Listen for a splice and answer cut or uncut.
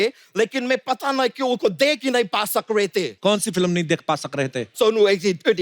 cut